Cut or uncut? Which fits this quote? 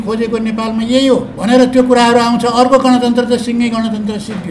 cut